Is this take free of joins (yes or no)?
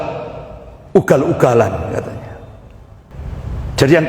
no